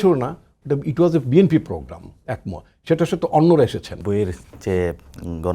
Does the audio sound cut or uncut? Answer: cut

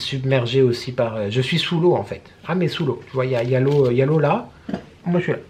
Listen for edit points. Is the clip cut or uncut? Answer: uncut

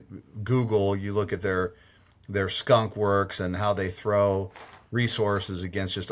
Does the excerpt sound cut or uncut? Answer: uncut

